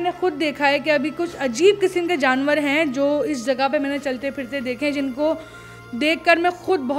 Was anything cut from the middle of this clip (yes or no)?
no